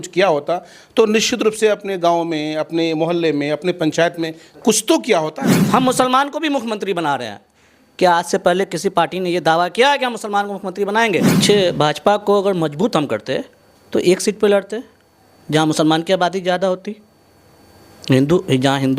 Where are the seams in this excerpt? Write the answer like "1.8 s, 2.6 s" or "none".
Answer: 5.5 s, 11.3 s

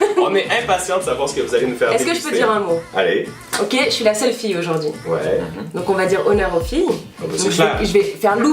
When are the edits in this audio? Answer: 1.5 s

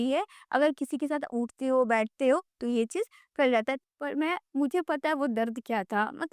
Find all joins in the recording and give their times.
3.8 s

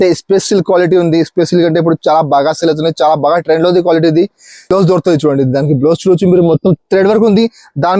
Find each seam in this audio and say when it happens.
4.6 s

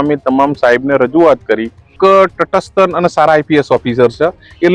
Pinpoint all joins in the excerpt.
1.9 s

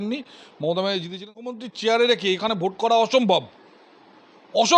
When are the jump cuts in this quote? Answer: 1.5 s

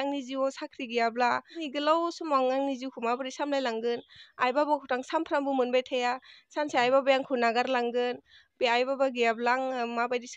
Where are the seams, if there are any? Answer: 1.5 s

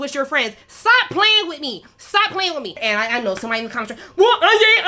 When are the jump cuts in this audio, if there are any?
2.8 s

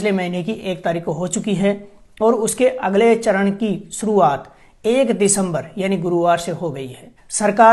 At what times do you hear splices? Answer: none

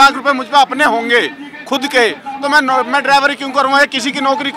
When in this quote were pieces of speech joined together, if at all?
none

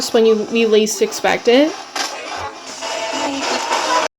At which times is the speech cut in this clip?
2.7 s

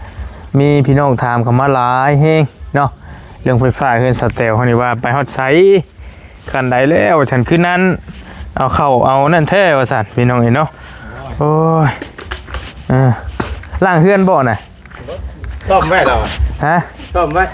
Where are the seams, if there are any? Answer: none

